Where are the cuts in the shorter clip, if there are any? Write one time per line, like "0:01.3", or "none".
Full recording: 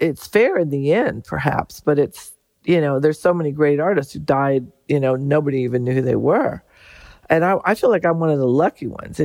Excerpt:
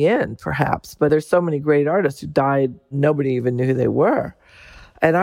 0:01.1
0:02.9